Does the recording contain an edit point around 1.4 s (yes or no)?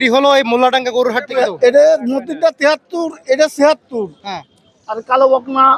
yes